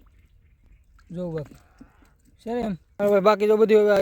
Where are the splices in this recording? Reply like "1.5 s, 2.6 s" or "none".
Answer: 2.8 s